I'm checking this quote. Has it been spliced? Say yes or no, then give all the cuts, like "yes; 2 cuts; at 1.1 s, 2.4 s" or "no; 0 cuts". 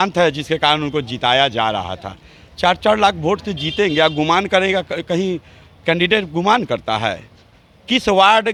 no; 0 cuts